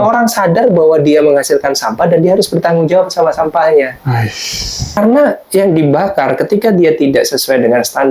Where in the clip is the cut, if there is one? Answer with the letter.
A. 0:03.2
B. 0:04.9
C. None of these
B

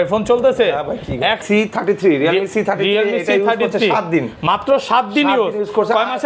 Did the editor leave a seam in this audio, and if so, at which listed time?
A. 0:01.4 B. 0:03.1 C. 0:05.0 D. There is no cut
A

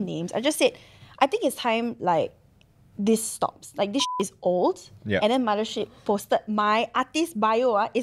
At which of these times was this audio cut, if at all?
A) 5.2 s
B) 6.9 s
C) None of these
A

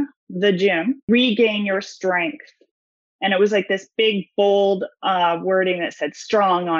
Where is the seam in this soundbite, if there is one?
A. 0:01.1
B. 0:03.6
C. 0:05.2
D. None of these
A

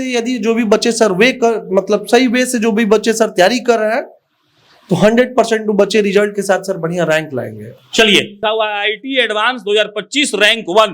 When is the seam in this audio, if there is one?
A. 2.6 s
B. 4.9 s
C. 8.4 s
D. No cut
C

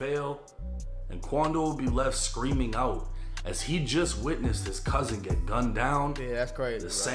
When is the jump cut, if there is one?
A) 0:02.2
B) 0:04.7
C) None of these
C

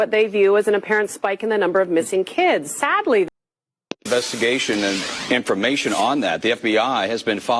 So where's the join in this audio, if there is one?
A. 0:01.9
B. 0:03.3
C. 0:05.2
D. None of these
B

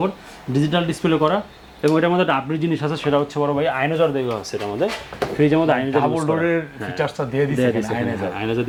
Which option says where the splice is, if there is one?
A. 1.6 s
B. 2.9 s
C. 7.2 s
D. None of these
D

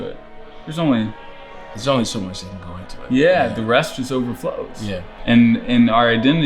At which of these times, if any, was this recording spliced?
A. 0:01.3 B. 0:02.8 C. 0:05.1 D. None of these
C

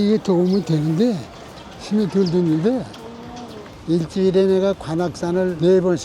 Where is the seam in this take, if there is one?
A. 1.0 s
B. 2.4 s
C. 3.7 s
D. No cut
C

